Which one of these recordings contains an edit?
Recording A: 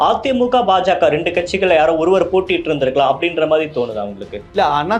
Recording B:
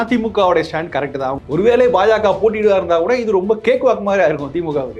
B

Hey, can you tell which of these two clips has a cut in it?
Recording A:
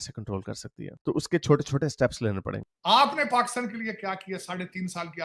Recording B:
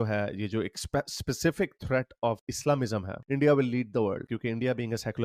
A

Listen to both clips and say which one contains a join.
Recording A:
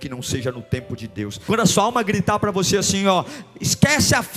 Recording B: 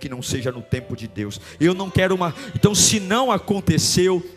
A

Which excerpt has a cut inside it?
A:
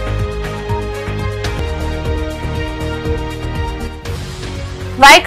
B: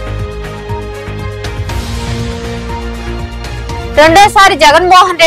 B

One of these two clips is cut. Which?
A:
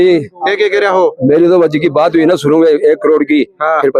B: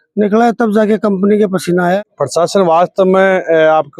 B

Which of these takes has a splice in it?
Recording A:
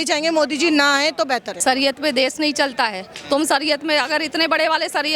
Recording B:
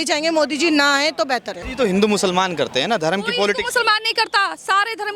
A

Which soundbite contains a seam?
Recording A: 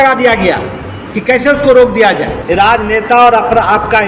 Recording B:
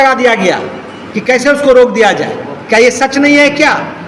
A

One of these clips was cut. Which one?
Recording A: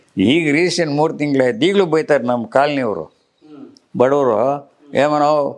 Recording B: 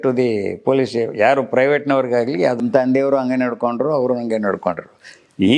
B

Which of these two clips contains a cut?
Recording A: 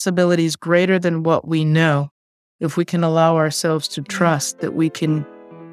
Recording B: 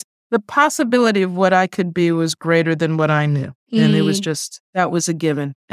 B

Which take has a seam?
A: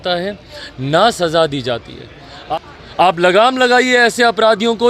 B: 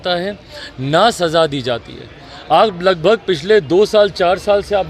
A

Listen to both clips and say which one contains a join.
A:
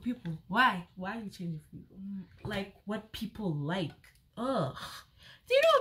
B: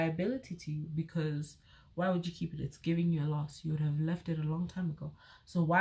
A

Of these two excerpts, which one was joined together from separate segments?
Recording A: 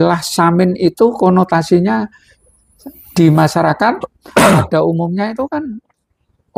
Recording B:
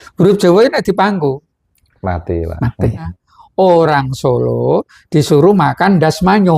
B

